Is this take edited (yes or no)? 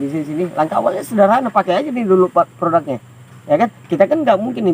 no